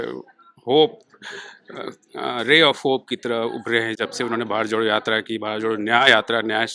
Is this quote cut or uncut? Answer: uncut